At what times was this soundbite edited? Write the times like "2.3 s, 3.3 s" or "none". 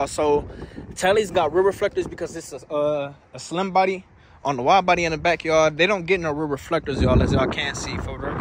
none